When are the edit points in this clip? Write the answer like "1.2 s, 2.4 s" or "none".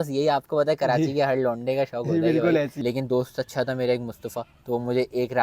2.7 s